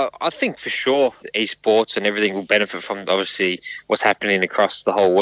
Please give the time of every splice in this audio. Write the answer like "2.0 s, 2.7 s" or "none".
1.2 s